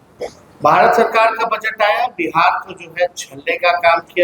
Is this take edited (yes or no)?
no